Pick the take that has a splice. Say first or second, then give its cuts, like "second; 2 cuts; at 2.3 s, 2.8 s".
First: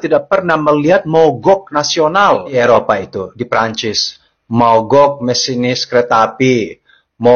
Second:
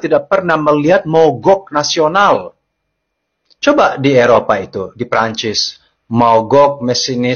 first; 1 cut; at 2.5 s